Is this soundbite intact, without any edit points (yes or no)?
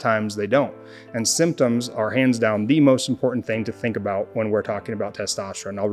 yes